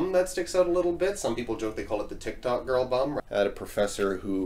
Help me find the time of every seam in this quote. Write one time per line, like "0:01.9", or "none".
0:03.2